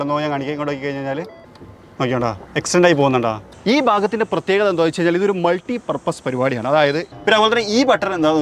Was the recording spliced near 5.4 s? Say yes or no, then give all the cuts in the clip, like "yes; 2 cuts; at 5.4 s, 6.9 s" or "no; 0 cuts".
no; 3 cuts; at 2.4 s, 3.5 s, 7.1 s